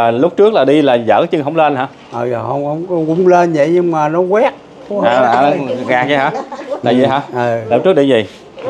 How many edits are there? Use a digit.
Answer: 0